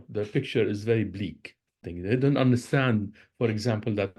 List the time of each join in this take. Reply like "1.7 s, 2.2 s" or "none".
1.9 s